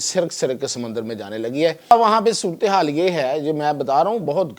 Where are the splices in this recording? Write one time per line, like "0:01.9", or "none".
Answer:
0:01.9